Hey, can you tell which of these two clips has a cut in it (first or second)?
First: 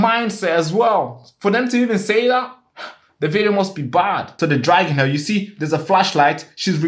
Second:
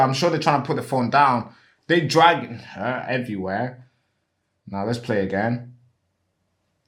first